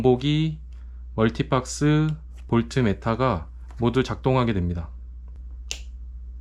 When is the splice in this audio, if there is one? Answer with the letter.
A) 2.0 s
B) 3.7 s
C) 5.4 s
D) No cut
C